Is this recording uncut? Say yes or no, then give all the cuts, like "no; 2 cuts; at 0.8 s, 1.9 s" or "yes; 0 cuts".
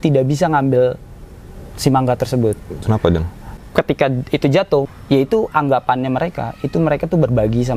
no; 2 cuts; at 3.6 s, 4.9 s